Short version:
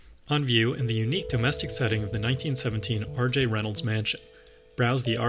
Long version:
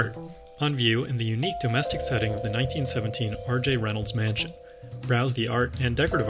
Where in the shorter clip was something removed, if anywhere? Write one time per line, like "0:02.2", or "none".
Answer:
none